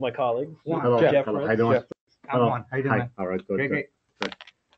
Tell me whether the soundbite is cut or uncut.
uncut